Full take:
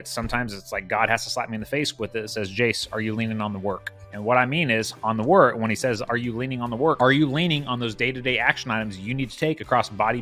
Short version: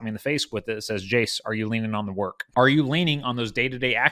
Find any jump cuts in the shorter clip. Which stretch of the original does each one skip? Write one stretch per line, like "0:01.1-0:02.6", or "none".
0:04.0-0:07.0